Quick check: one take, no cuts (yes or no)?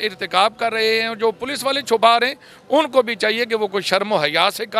yes